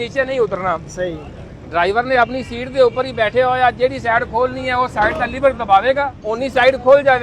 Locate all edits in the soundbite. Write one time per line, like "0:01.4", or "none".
0:06.2